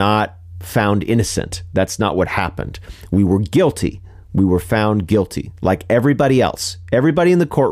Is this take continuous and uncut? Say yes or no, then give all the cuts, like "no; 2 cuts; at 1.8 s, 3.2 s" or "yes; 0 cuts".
yes; 0 cuts